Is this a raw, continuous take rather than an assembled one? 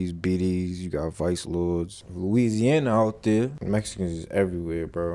no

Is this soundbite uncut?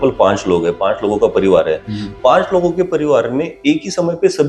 yes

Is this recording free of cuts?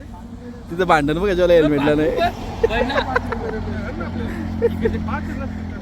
yes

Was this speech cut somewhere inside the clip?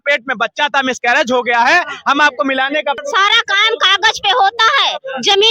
yes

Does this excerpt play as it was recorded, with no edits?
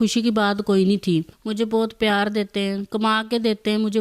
no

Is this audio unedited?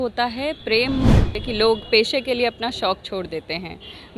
no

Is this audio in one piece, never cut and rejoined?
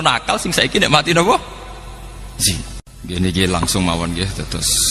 no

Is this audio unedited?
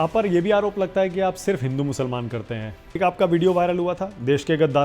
no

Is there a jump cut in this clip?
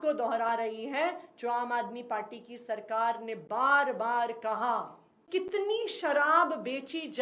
yes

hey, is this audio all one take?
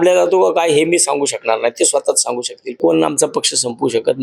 no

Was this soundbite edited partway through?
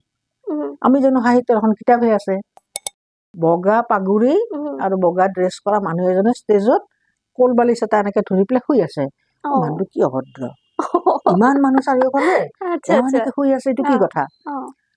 yes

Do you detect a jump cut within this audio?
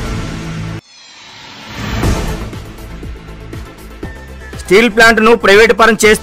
no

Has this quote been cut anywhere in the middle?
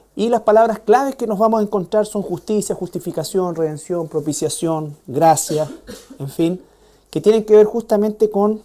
yes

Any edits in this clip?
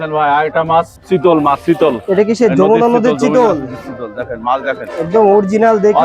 yes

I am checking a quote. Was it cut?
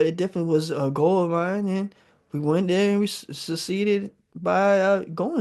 no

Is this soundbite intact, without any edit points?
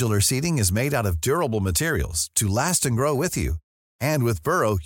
yes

